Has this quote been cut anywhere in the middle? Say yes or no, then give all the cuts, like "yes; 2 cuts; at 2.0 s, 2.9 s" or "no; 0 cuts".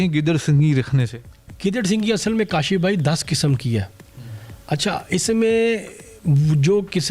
no; 0 cuts